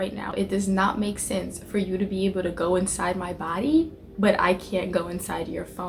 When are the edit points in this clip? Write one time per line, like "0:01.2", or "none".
none